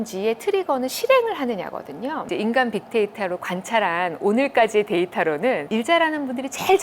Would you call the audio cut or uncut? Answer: cut